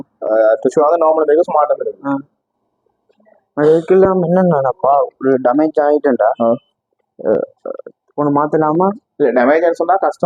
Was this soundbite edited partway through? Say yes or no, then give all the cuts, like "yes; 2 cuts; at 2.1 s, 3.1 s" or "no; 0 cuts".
no; 0 cuts